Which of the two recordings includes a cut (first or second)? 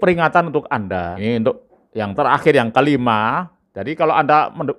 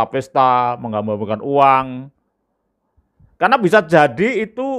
first